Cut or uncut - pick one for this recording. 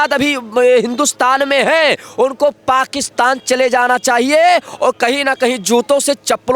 uncut